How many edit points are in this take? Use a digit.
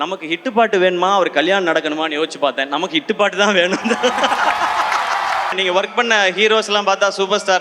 1